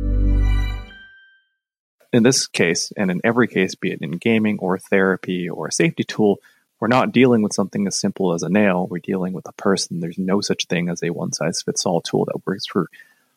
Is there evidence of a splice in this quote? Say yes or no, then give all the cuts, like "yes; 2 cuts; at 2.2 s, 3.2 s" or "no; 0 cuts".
yes; 1 cut; at 2.0 s